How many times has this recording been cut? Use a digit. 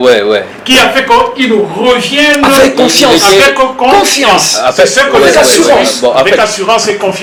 0